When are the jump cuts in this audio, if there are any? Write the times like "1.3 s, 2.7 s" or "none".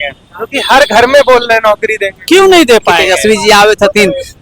3.0 s